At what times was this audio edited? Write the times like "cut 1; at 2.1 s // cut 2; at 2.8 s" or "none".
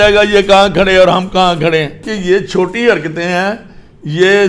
cut 1; at 2.1 s